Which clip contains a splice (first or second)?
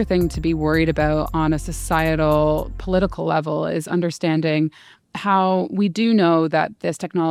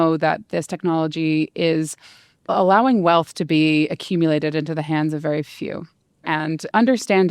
second